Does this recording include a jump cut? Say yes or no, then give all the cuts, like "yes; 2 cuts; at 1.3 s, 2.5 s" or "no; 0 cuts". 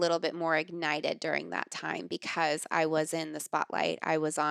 no; 0 cuts